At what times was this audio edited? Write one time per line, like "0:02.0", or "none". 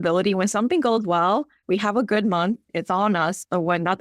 0:01.5
0:02.7